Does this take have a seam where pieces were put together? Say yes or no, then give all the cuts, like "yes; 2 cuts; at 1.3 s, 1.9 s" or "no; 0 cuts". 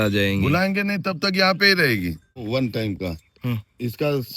yes; 1 cut; at 2.4 s